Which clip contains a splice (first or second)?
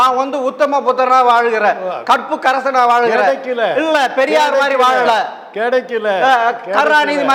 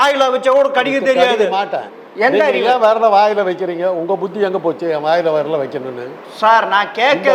second